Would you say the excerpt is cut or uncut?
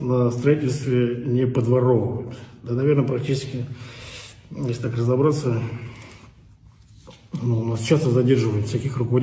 uncut